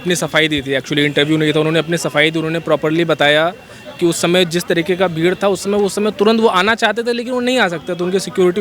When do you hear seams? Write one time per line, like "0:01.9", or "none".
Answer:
none

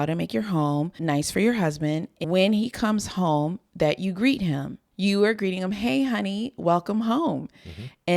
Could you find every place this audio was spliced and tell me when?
0:02.1
0:04.8

